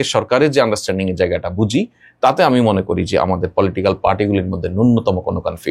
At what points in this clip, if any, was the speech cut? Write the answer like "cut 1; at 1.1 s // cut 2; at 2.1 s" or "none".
none